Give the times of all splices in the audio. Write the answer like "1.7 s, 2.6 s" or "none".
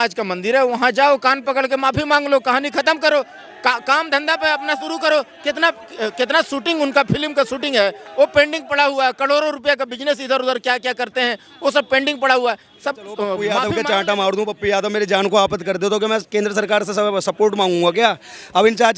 12.9 s